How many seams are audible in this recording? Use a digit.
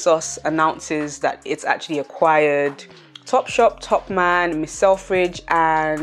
0